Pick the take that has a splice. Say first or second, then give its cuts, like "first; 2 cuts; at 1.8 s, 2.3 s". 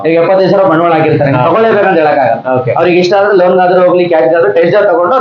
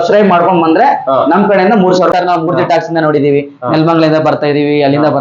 second; 1 cut; at 2.1 s